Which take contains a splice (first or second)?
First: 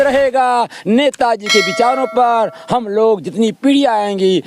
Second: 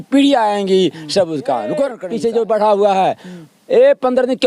second